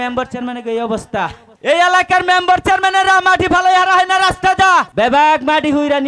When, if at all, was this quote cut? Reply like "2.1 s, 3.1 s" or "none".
1.5 s, 4.9 s